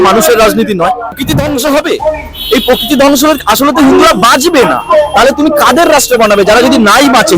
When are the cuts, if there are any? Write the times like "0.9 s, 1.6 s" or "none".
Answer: 1.2 s